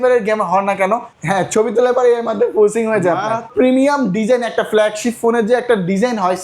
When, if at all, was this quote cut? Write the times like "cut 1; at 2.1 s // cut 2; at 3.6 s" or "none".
cut 1; at 1.1 s // cut 2; at 3.5 s